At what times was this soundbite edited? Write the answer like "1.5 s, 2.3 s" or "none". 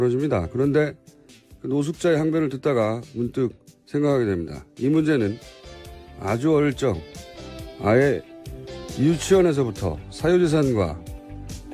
4.8 s